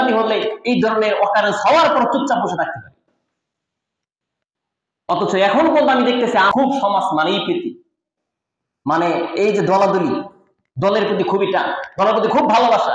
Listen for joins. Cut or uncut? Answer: uncut